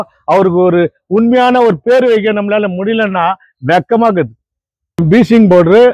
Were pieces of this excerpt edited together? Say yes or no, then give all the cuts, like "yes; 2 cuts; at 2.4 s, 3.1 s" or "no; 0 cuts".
yes; 1 cut; at 5.0 s